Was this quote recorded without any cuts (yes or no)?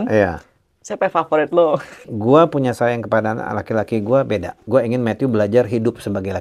no